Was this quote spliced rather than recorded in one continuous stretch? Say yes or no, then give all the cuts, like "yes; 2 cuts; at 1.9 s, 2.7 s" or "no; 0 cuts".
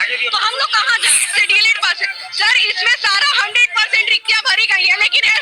yes; 1 cut; at 1.5 s